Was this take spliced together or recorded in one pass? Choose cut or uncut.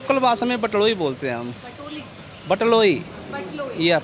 uncut